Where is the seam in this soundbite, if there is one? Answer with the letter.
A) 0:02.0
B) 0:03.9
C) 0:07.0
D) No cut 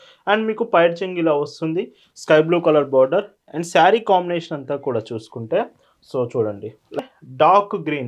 C